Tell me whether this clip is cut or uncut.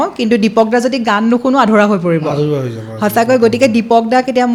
uncut